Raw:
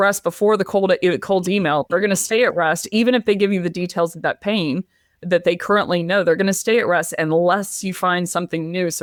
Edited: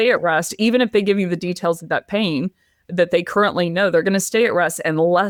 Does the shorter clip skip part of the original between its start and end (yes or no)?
no